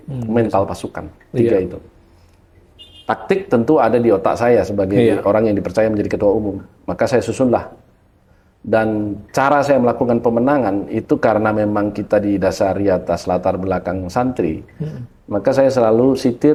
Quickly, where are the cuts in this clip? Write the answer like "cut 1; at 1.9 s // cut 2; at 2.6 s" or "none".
none